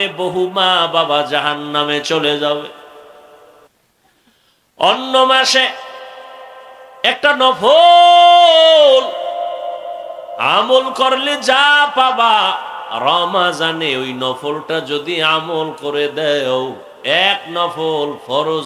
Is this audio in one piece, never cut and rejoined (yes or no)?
no